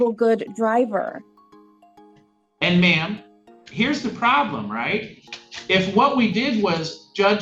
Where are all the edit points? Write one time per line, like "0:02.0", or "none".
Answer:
none